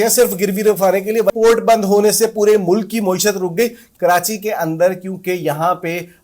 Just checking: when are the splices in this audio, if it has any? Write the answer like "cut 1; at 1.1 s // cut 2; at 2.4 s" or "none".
cut 1; at 1.3 s // cut 2; at 3.9 s

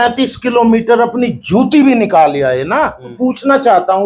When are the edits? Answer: cut 1; at 3.1 s

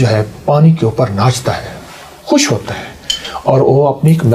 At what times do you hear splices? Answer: none

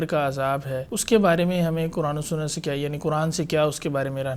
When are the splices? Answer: cut 1; at 0.9 s

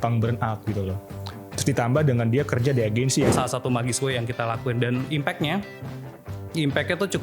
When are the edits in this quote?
cut 1; at 3.3 s

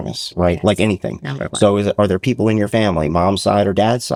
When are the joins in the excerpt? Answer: none

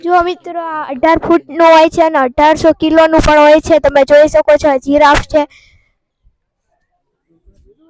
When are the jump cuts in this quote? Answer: none

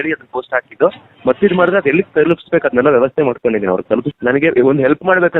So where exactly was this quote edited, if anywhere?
cut 1; at 4.1 s

